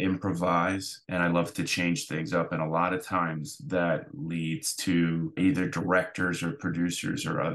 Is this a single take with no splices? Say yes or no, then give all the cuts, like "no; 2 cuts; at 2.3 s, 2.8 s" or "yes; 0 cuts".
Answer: no; 2 cuts; at 1.0 s, 5.4 s